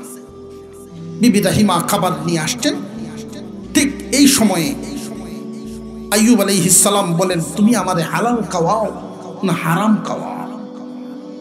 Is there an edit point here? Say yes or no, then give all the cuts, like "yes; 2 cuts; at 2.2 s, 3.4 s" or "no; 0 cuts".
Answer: no; 0 cuts